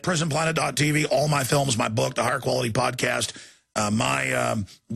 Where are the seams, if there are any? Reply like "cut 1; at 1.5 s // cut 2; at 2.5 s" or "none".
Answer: cut 1; at 1.9 s

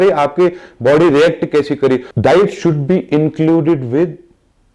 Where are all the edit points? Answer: cut 1; at 2.1 s

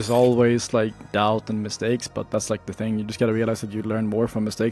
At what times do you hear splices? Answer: cut 1; at 1.0 s

